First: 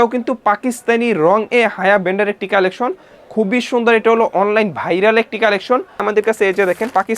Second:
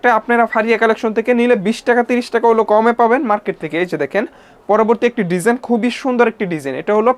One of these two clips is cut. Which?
first; 1 cut; at 6.0 s

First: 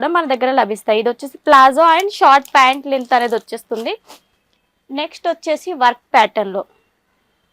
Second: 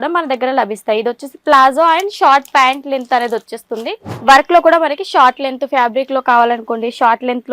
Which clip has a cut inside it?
second; 1 cut; at 4.1 s

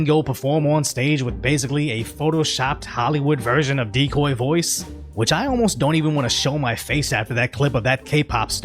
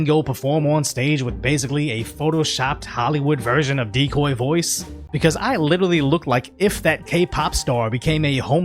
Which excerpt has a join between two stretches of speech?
second; 1 cut; at 5.0 s

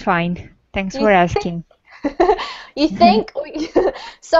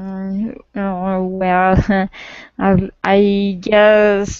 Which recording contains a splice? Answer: first; 1 cut; at 1.7 s

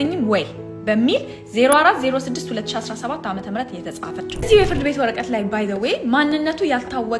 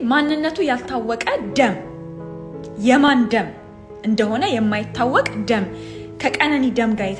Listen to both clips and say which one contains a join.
first; 1 cut; at 4.1 s

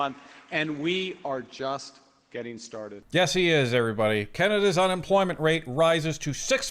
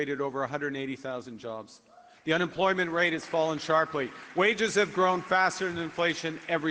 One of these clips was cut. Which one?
first; 1 cut; at 3.0 s

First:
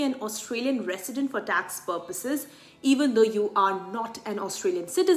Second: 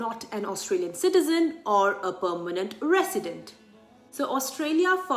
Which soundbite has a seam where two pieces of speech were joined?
second; 1 cut; at 3.7 s

